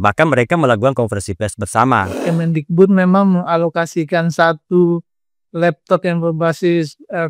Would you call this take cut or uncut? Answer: cut